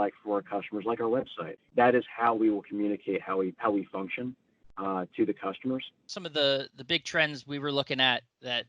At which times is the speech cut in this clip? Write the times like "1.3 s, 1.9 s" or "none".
1.4 s, 6.2 s